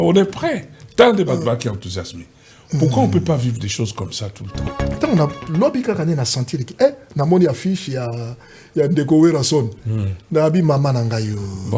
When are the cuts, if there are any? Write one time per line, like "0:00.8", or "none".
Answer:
0:05.0

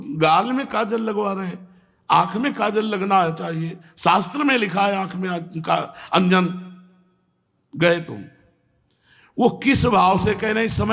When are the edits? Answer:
none

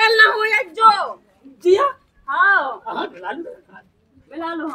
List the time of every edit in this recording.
none

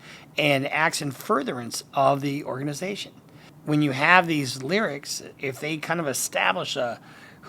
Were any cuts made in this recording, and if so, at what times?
0:05.3

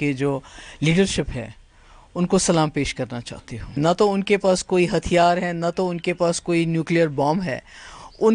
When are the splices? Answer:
0:03.8

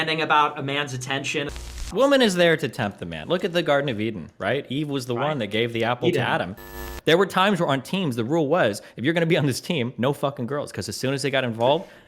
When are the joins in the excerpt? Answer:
0:01.5
0:06.8

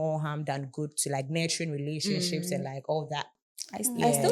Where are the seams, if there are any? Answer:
none

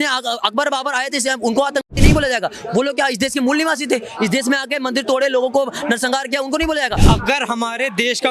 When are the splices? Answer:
0:07.0

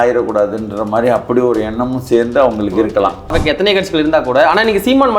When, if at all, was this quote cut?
0:03.4

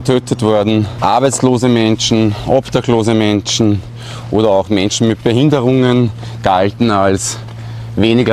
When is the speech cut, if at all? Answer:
none

